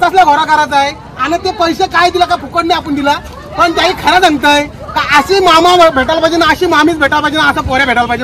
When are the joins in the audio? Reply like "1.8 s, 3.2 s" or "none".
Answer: none